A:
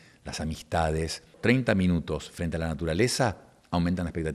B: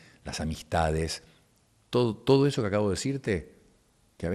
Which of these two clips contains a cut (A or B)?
A